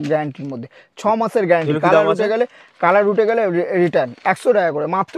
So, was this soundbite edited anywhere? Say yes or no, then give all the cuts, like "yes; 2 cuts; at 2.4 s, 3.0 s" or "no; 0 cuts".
no; 0 cuts